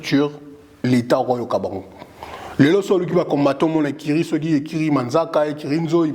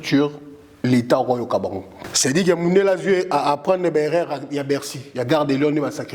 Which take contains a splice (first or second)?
second